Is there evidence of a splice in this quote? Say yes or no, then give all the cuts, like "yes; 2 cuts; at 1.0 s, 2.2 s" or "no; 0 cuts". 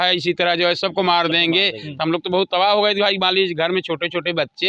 no; 0 cuts